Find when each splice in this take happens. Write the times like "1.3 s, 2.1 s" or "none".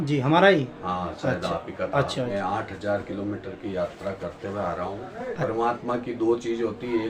2.3 s, 5.4 s